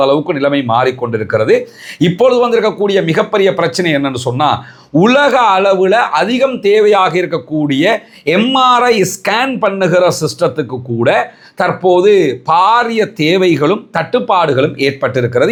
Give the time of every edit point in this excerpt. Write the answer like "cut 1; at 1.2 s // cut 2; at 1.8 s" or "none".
none